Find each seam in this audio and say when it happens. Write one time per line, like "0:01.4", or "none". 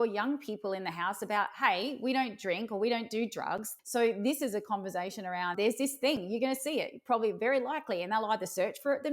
0:03.7
0:05.5